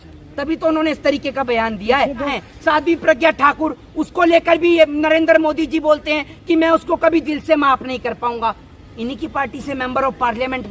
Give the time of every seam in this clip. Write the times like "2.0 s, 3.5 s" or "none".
2.3 s